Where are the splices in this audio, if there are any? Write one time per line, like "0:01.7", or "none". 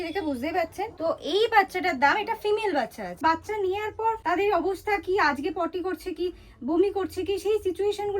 0:00.9
0:03.2
0:04.2

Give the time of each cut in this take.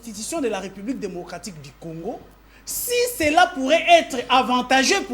none

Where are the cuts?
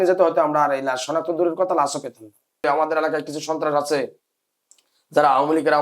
0:02.6

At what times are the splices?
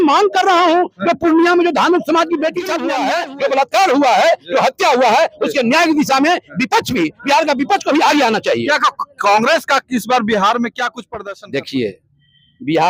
0:02.8
0:11.1

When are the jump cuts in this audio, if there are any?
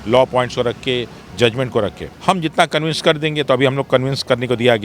0:02.1

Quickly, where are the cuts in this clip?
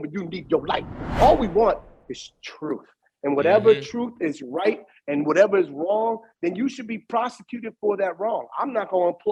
0:01.1

